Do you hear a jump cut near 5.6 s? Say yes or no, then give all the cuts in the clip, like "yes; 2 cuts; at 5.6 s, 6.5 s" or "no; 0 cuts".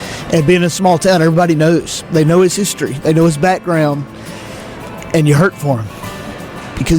no; 0 cuts